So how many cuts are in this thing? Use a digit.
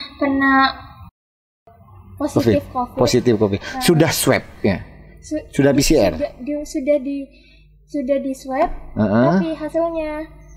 0